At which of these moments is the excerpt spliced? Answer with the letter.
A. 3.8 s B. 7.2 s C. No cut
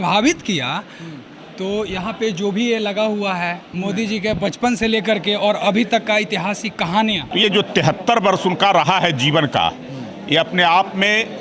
B